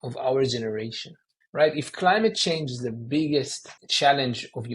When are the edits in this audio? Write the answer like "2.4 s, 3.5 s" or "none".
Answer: 3.8 s